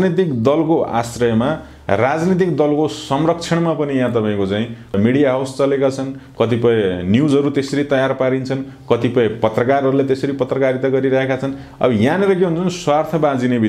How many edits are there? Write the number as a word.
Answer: zero